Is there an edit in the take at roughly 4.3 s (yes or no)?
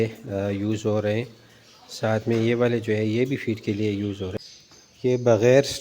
yes